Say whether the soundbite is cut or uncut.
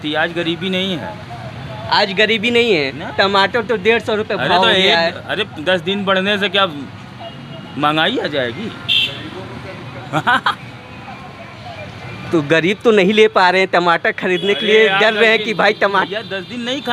uncut